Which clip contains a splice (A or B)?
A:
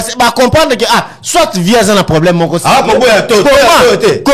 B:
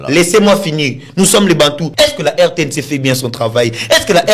B